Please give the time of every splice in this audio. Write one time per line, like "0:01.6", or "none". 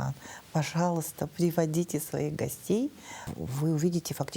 0:03.3